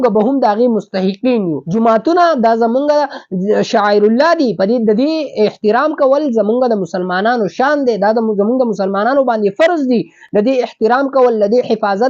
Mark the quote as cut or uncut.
cut